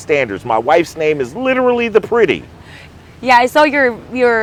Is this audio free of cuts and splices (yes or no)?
yes